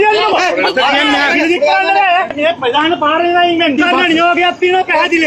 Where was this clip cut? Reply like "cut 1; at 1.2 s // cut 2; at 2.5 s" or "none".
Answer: cut 1; at 2.3 s // cut 2; at 3.8 s

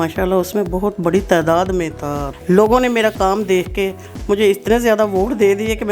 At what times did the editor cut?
cut 1; at 2.3 s

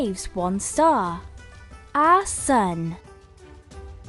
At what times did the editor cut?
cut 1; at 3.0 s

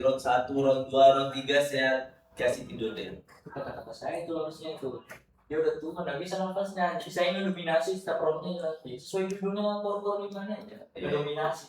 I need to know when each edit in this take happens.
none

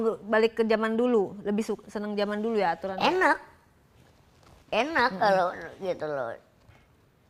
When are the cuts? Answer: none

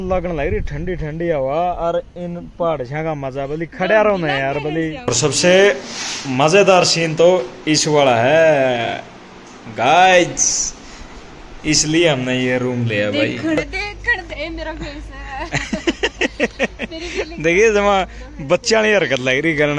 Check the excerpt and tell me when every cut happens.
cut 1; at 5.1 s // cut 2; at 13.6 s

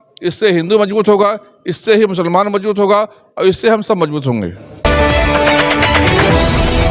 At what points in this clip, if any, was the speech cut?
cut 1; at 4.8 s

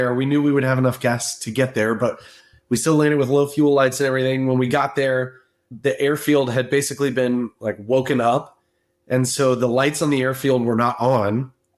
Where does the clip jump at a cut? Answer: cut 1; at 5.7 s

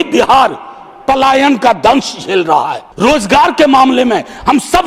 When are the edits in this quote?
cut 1; at 2.8 s

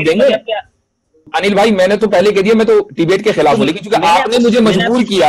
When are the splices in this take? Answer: cut 1; at 1.3 s

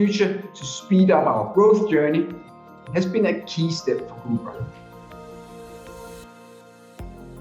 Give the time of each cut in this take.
cut 1; at 4.7 s

